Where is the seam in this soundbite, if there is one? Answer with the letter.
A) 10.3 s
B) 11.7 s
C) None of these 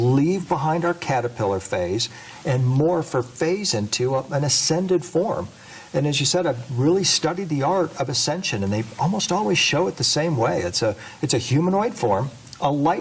A